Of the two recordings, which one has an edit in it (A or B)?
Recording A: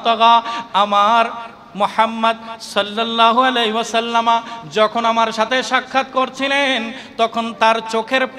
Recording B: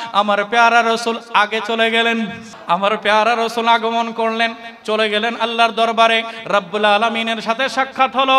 B